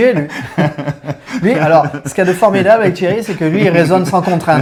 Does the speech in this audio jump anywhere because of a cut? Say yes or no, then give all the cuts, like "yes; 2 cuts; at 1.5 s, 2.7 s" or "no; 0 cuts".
no; 0 cuts